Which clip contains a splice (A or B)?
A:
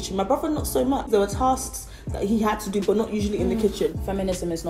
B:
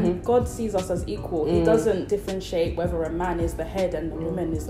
A